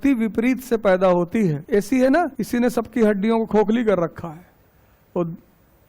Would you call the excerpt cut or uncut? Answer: cut